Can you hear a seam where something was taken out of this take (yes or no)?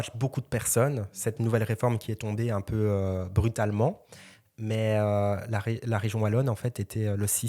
no